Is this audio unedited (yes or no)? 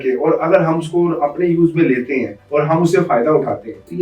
yes